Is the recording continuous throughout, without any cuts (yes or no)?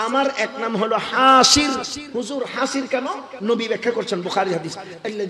no